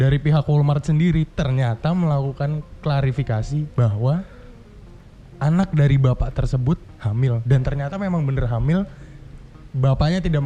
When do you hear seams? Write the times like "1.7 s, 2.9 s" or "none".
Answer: none

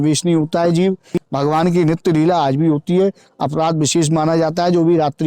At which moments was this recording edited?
1.2 s

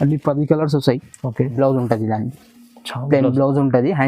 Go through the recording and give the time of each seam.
1.5 s

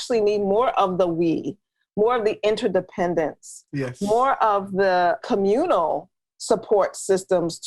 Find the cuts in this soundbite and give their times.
5.2 s

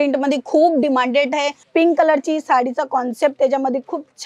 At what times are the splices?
1.6 s

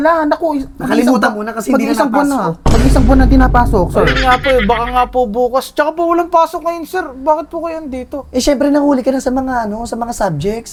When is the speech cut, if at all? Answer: none

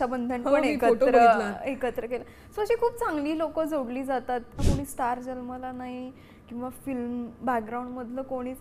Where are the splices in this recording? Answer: 4.6 s

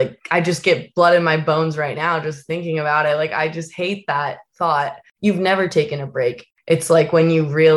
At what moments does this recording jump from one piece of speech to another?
5.0 s, 6.5 s

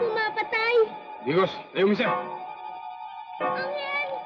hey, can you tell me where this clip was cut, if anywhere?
2.6 s

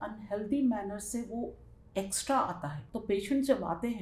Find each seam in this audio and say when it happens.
2.8 s

